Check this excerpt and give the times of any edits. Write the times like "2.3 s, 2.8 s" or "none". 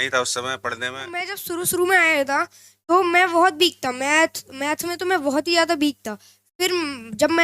1.4 s